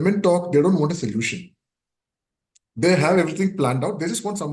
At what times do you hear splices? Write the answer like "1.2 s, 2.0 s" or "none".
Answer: none